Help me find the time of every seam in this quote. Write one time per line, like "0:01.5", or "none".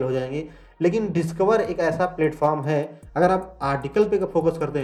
none